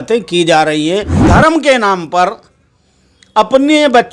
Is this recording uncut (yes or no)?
no